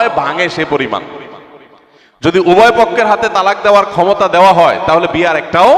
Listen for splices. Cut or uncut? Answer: uncut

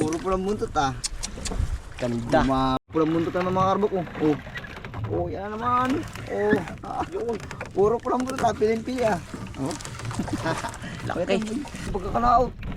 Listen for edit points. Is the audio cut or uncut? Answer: cut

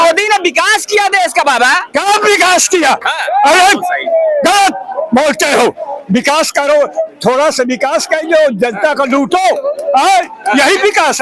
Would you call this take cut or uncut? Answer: uncut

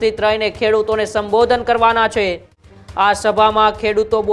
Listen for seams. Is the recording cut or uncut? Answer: uncut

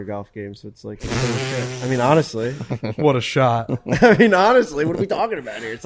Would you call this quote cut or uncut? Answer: uncut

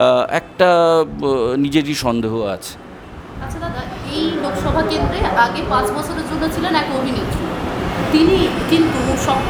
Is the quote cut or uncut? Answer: uncut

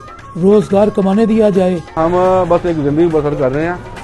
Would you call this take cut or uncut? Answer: cut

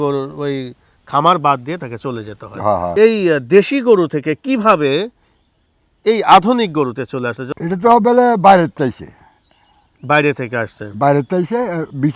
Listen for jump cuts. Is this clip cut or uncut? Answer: cut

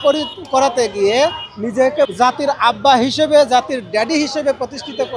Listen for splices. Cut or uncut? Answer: cut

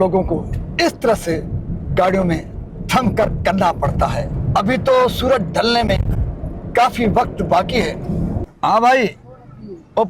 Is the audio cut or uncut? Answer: cut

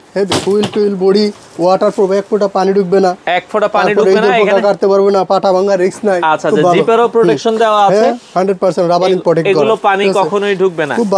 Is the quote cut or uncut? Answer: uncut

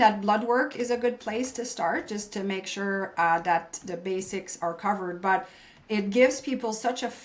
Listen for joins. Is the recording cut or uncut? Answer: uncut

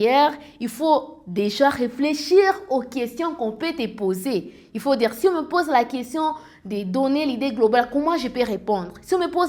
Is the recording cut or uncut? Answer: uncut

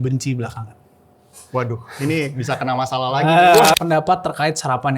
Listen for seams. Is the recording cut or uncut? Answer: cut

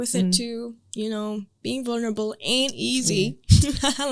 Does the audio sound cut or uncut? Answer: uncut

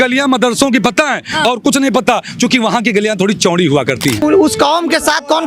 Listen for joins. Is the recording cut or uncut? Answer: cut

